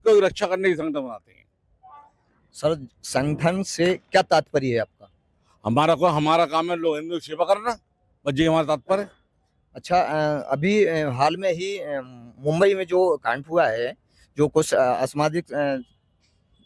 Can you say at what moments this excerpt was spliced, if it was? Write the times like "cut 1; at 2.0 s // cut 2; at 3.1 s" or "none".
none